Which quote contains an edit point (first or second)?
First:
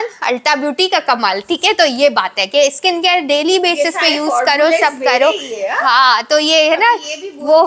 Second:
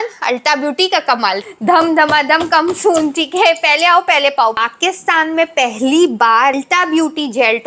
second